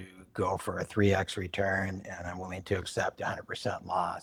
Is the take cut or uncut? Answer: uncut